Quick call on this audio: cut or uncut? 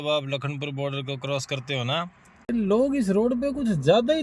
cut